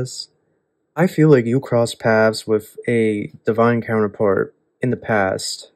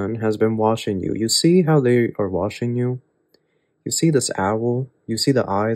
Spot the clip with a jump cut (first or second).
first